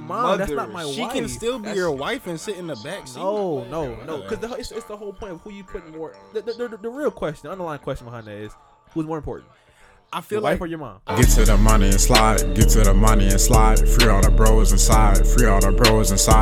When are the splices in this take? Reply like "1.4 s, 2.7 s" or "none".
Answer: 11.1 s